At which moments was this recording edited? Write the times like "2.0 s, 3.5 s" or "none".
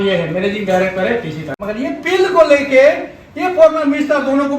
1.6 s